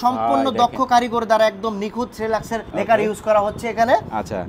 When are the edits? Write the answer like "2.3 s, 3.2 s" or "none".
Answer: 2.6 s